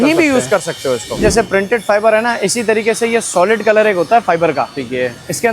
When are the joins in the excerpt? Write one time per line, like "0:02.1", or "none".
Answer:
0:01.2